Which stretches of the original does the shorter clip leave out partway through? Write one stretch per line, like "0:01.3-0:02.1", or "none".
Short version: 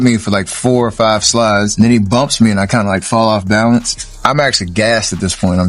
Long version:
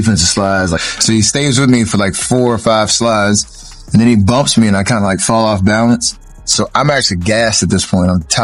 0:03.4-0:03.9
0:06.4-0:06.7